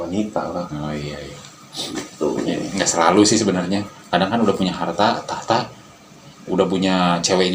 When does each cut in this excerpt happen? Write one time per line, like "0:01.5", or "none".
none